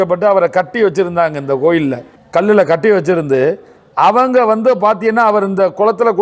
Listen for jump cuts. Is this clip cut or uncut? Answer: cut